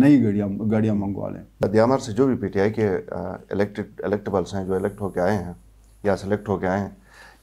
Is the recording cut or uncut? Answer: cut